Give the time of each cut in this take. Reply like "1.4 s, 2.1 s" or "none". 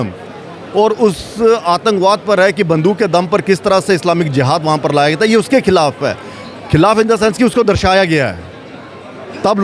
none

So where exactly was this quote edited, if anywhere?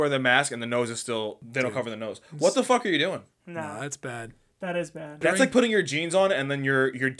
5.2 s

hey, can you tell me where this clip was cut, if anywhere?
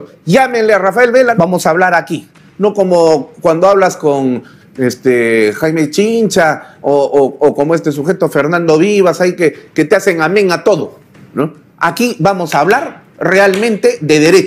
1.3 s

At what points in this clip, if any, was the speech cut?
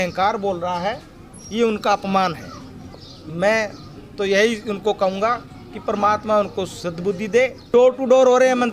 7.6 s

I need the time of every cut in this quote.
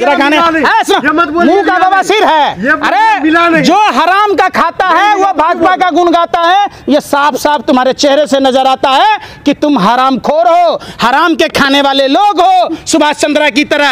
none

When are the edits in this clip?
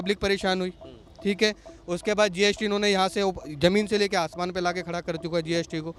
none

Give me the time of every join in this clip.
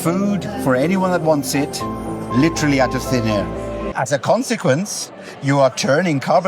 3.9 s

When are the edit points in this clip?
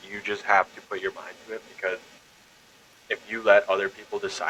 none

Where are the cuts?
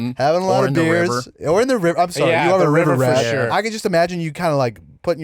3.5 s

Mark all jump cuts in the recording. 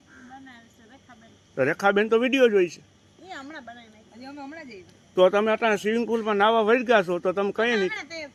none

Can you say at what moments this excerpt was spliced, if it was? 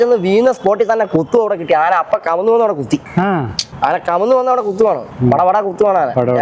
none

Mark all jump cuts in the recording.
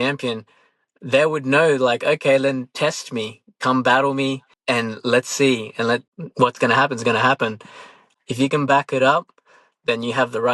4.5 s, 6.1 s, 8.0 s

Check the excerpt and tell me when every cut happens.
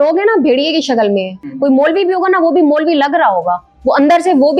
1.4 s

